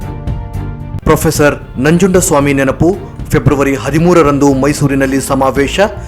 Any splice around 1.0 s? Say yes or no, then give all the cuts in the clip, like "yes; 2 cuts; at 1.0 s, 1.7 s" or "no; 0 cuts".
yes; 1 cut; at 1.0 s